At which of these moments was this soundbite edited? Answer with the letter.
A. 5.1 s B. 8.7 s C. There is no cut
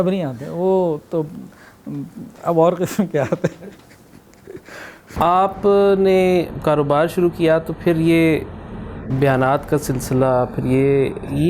A